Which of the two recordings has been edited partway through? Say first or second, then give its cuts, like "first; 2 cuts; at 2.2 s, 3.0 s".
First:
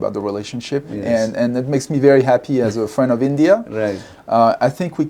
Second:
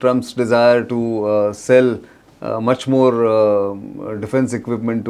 first; 1 cut; at 0.9 s